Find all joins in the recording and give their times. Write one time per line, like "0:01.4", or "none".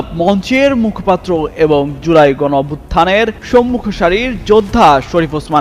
none